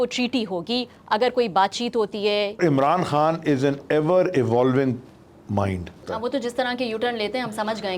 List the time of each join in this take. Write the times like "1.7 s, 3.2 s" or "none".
2.6 s, 6.1 s